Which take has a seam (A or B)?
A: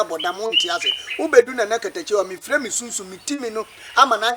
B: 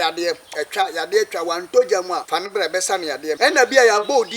B